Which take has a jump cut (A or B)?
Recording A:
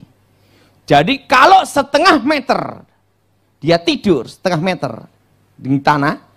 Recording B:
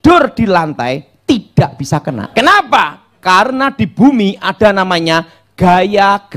B